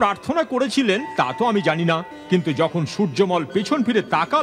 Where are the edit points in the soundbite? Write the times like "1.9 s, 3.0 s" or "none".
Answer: none